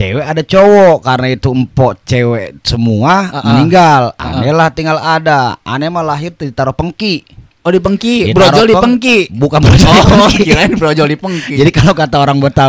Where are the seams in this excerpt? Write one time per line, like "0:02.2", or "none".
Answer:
none